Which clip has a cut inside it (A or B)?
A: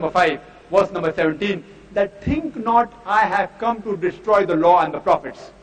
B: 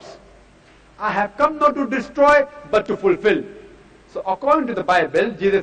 A